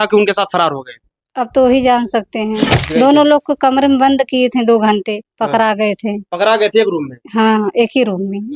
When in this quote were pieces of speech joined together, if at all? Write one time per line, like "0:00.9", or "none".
0:02.8